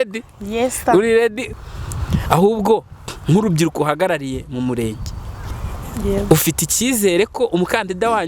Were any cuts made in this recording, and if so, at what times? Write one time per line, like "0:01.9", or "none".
0:01.4